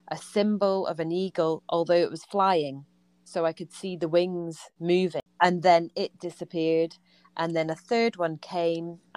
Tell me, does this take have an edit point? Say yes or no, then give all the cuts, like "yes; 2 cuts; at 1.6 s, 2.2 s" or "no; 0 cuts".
yes; 1 cut; at 5.2 s